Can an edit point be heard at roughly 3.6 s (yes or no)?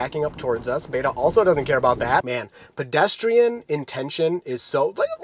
no